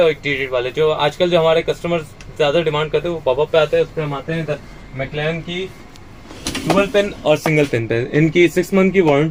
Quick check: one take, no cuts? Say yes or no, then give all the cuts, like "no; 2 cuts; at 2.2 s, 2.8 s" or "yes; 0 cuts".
yes; 0 cuts